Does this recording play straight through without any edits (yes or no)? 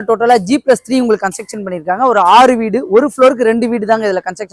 yes